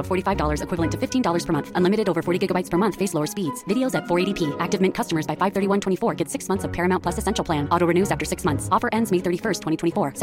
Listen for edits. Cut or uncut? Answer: uncut